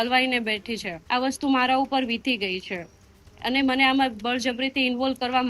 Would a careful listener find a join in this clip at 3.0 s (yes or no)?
no